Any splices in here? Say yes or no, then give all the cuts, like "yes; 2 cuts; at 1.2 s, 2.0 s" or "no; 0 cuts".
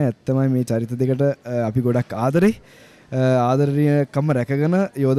no; 0 cuts